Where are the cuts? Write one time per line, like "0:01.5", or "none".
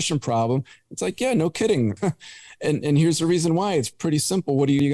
none